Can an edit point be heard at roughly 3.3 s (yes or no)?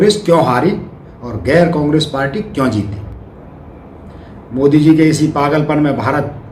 yes